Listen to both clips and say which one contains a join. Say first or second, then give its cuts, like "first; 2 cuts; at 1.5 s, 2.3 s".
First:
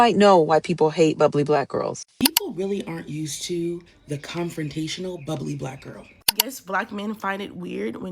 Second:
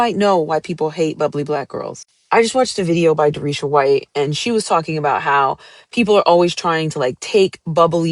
first; 2 cuts; at 2.0 s, 6.6 s